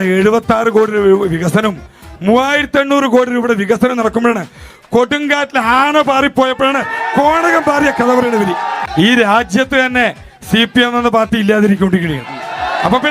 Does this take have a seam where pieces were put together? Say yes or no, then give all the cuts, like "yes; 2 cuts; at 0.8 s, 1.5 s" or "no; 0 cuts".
yes; 1 cut; at 8.8 s